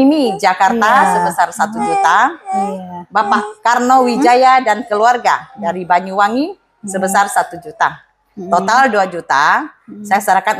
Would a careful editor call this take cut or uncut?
uncut